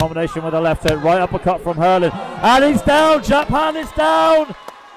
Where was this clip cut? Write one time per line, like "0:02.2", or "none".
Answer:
none